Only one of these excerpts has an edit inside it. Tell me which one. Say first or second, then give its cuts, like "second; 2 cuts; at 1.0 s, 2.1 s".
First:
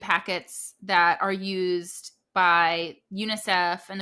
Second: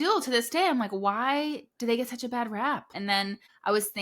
second; 1 cut; at 2.9 s